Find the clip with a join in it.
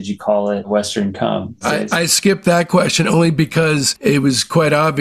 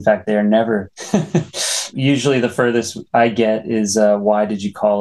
first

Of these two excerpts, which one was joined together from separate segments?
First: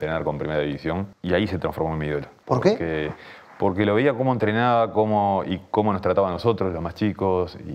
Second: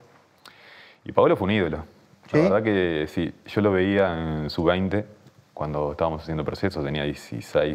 first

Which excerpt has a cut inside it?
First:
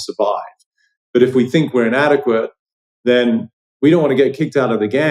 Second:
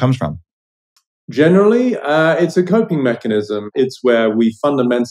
second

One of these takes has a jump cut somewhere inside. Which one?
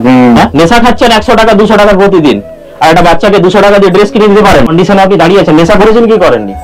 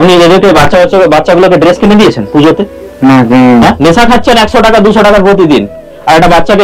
first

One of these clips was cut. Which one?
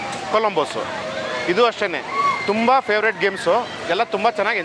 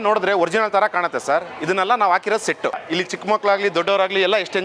second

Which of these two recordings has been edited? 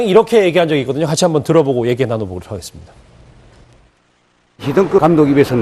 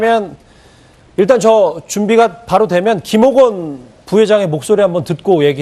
first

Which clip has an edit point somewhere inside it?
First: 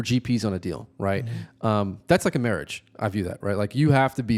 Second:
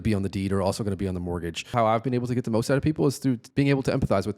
second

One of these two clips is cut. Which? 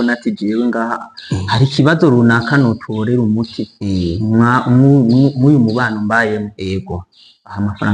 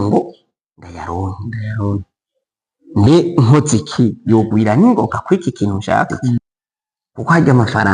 second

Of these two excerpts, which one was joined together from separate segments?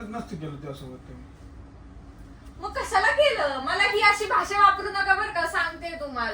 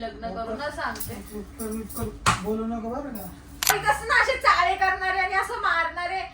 second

